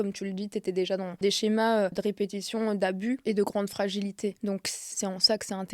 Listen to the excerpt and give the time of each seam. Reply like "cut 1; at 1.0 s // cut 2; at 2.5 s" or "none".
cut 1; at 1.2 s // cut 2; at 2.0 s // cut 3; at 3.2 s // cut 4; at 4.8 s